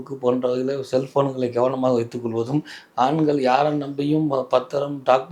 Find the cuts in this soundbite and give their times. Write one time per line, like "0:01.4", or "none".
none